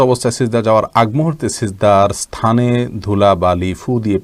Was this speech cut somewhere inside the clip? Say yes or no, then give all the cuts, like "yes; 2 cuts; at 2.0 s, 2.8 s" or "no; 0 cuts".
no; 0 cuts